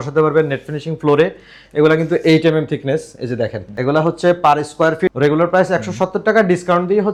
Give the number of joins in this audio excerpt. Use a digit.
0